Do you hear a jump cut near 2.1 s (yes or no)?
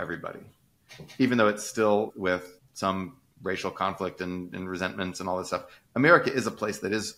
yes